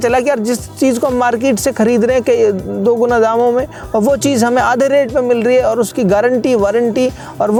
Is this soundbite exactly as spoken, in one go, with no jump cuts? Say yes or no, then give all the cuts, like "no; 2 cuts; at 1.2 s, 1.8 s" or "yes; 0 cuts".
yes; 0 cuts